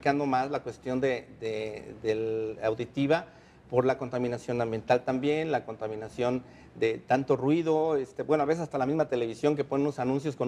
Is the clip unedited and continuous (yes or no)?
yes